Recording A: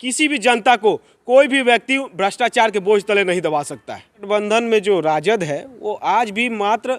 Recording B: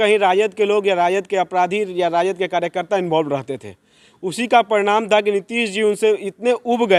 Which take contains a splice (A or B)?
A